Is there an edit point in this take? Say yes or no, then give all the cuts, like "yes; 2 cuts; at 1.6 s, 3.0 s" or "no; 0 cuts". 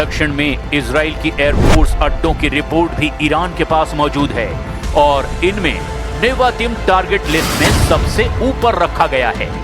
yes; 1 cut; at 0.9 s